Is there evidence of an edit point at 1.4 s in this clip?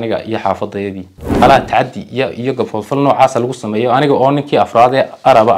yes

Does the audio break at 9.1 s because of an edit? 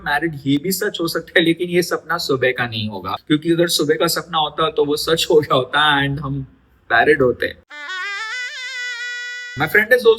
yes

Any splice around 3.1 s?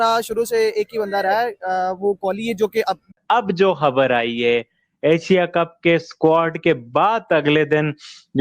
yes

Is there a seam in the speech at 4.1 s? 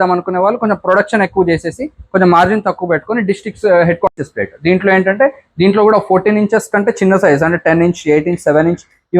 yes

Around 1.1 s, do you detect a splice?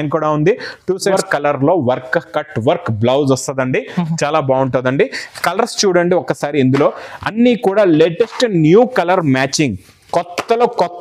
yes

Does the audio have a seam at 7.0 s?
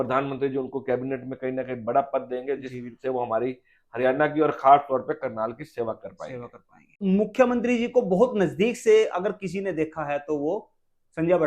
yes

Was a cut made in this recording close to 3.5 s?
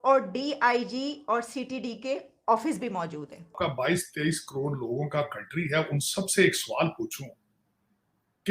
yes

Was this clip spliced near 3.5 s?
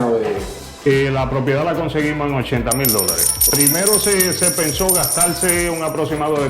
yes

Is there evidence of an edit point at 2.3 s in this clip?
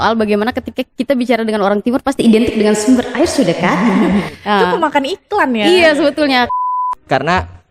no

